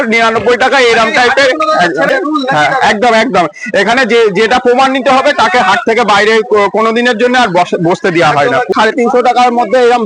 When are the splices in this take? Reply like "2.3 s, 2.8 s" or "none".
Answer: 2.1 s, 8.7 s